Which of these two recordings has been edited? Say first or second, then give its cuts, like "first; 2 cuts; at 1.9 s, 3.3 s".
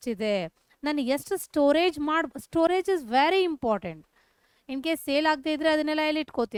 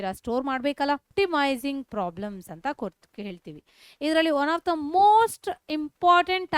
second; 1 cut; at 1.1 s